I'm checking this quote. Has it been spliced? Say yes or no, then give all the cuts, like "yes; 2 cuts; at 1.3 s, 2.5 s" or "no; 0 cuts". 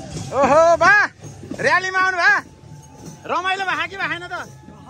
no; 0 cuts